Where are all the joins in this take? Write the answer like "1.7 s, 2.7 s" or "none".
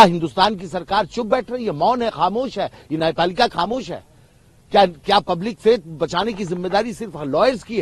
none